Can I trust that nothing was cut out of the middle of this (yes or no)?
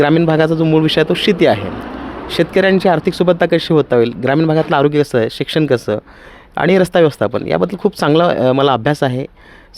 yes